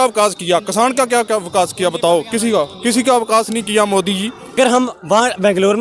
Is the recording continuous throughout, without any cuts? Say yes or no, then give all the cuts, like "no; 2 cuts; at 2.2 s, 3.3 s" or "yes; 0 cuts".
no; 1 cut; at 4.6 s